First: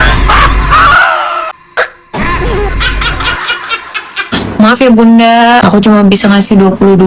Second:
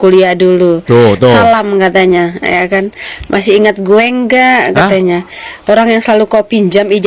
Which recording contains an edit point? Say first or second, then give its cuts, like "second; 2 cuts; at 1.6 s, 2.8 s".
first; 3 cuts; at 1.6 s, 4.4 s, 5.6 s